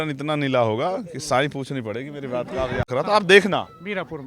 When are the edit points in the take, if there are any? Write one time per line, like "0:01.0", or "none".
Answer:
0:02.9